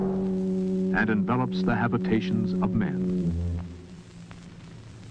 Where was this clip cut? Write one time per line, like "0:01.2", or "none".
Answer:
0:01.7